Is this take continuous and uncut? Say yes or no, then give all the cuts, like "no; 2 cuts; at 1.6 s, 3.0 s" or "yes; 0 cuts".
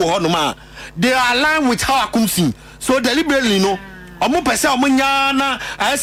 yes; 0 cuts